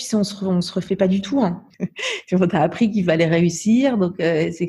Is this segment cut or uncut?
cut